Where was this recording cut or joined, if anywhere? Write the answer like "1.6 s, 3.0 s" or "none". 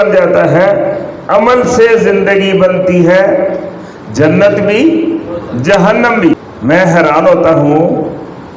6.4 s